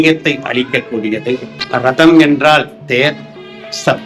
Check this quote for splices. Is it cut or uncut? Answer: cut